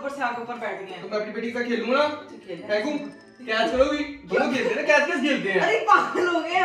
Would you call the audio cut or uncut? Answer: uncut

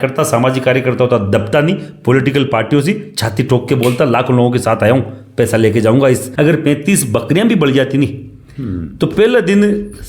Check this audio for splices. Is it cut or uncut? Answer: cut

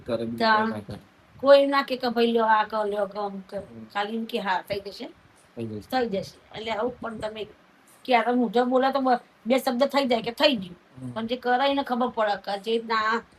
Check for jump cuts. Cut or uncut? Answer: uncut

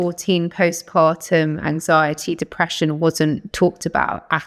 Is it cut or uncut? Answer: uncut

